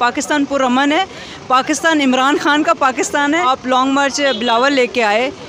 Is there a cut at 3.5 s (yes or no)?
yes